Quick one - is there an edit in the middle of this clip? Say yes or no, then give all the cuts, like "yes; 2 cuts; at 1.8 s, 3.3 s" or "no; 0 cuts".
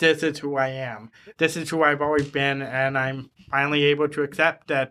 no; 0 cuts